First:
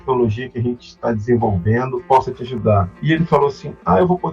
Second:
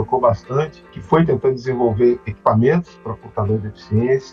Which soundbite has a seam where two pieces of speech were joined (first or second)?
first